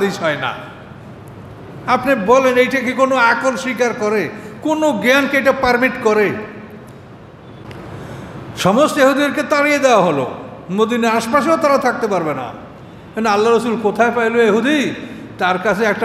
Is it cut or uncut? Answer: cut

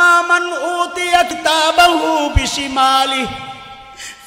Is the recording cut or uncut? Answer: cut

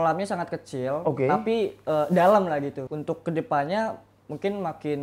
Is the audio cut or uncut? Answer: cut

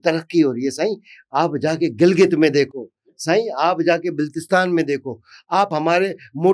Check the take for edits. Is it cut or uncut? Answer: uncut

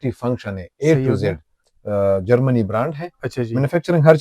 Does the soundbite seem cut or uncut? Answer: cut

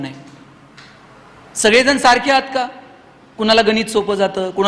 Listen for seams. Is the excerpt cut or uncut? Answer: uncut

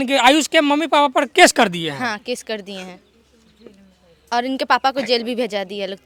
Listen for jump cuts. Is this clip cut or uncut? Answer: uncut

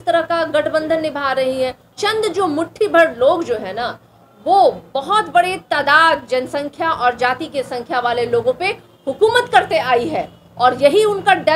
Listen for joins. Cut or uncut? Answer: cut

